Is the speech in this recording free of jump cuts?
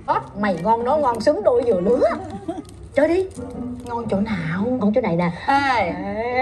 yes; 0 cuts

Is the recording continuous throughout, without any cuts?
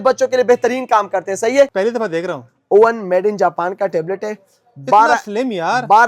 no; 1 cut; at 1.7 s

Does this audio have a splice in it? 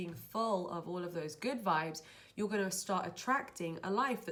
no; 0 cuts

